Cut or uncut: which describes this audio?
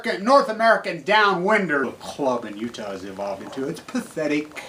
uncut